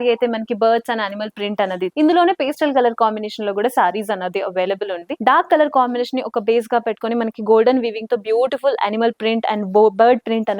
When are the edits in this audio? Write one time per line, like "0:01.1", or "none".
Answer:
0:01.9
0:05.1